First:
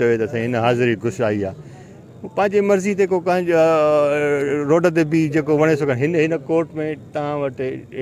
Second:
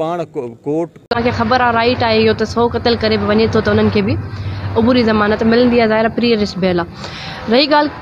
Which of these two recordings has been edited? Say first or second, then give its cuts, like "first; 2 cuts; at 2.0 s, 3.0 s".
second; 1 cut; at 1.1 s